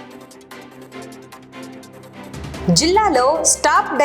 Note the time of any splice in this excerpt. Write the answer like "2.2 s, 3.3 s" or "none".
1.2 s